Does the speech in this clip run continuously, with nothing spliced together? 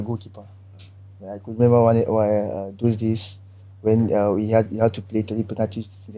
yes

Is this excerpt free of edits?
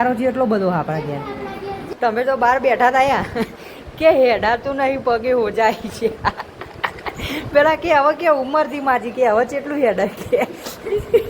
no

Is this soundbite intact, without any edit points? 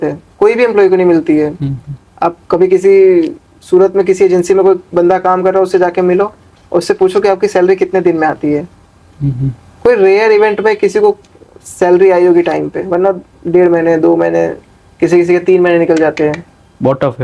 yes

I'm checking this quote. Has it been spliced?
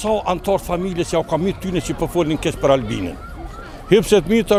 no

